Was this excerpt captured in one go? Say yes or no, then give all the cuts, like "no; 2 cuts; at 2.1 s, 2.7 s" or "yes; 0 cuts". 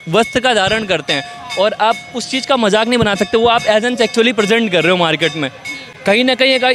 yes; 0 cuts